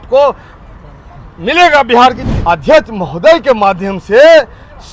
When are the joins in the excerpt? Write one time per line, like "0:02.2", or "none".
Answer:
0:02.2